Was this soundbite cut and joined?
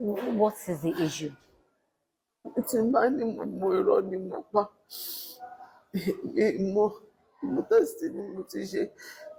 no; 0 cuts

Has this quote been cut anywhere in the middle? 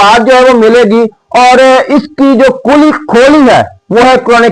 no; 0 cuts

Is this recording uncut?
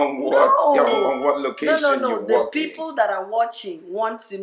yes; 0 cuts

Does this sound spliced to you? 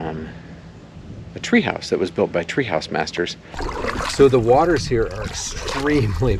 yes; 1 cut; at 3.5 s

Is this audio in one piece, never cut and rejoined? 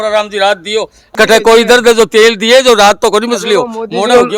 no; 1 cut; at 1.0 s

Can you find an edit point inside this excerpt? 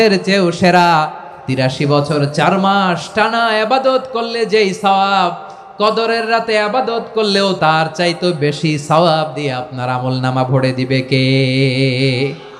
yes; 2 cuts; at 1.6 s, 7.6 s

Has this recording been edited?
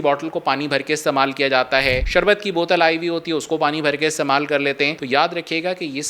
no; 0 cuts

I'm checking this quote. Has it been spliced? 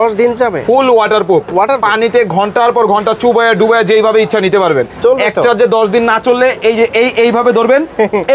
no; 0 cuts

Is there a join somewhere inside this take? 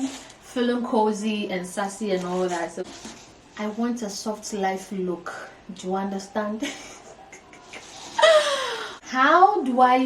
yes; 2 cuts; at 2.9 s, 8.7 s

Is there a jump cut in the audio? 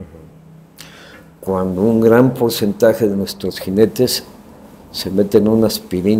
no; 0 cuts

